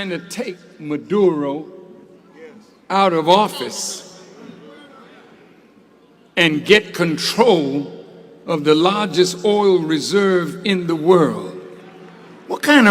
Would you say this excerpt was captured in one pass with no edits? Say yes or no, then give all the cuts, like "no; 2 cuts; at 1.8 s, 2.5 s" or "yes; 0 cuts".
yes; 0 cuts